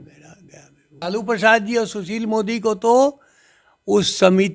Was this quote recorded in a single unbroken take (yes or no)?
no